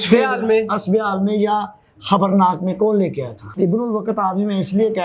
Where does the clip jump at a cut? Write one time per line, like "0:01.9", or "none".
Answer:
0:03.4